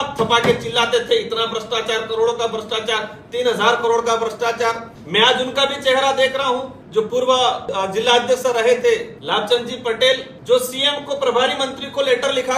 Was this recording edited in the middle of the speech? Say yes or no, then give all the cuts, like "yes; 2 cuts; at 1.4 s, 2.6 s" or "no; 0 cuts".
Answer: yes; 5 cuts; at 4.9 s, 6.8 s, 7.6 s, 9.1 s, 10.5 s